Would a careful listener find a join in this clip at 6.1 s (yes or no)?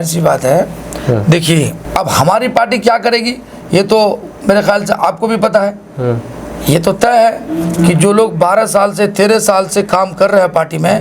no